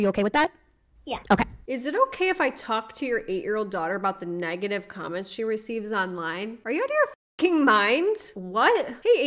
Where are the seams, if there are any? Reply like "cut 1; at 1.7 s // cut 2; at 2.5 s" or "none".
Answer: cut 1; at 1.7 s